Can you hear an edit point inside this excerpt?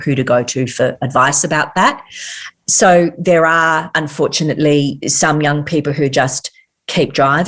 yes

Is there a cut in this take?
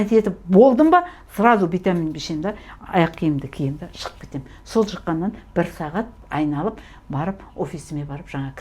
yes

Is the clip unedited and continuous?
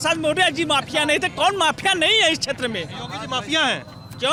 yes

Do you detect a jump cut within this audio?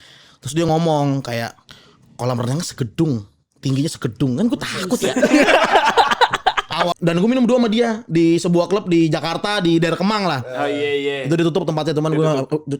yes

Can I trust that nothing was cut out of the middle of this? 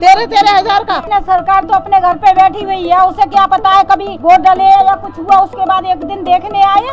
no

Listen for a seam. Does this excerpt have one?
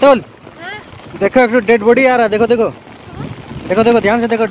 no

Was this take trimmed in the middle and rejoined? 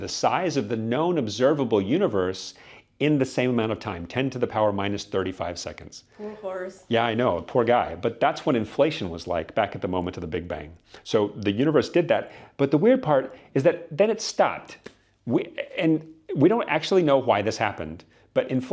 no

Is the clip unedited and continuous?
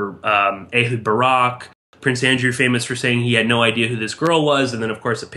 no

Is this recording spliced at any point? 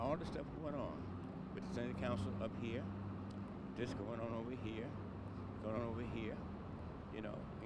yes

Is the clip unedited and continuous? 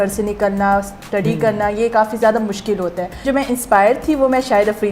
no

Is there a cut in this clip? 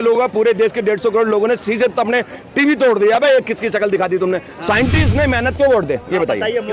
yes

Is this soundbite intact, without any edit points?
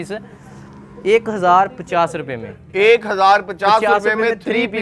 yes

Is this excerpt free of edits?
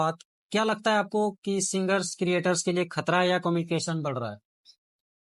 yes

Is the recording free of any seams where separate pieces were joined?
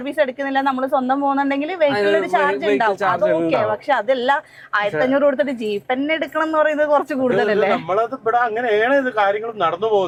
yes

